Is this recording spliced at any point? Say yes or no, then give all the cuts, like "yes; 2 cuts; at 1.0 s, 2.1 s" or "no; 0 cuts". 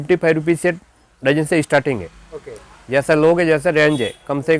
no; 0 cuts